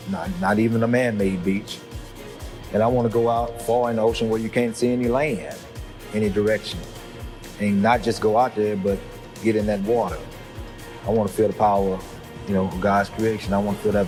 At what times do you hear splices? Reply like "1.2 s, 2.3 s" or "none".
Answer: none